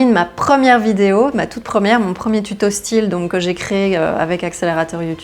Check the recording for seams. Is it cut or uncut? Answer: uncut